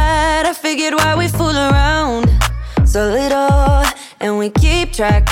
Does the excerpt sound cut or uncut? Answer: uncut